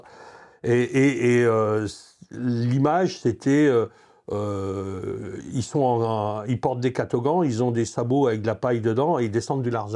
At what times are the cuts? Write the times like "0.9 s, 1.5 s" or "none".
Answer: none

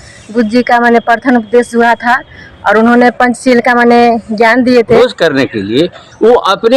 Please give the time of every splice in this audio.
5.0 s

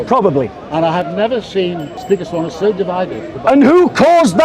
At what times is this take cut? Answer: 1.9 s, 3.3 s

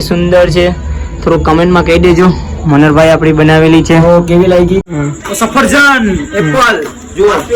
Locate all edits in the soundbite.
4.9 s

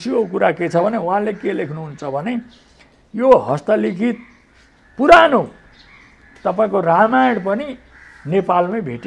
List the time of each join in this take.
none

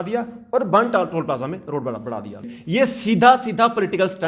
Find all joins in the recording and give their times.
2.5 s

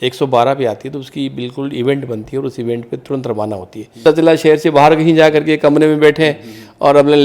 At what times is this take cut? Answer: 4.0 s

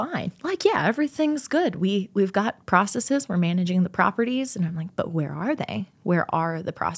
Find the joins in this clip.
none

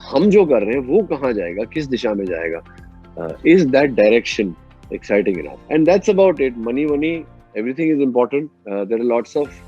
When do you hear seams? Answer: none

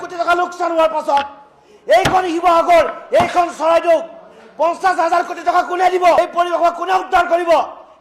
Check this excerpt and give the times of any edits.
none

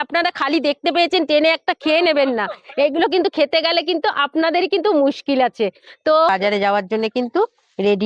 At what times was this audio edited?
6.3 s

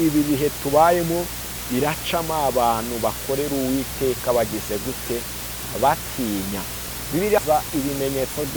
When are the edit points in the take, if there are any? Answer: 7.4 s

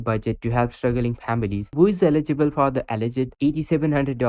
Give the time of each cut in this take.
1.7 s

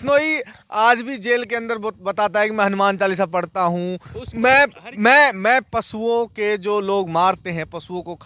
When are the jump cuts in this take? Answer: none

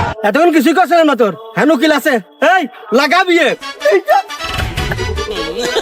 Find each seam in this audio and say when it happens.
none

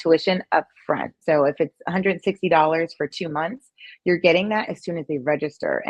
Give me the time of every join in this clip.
1.1 s

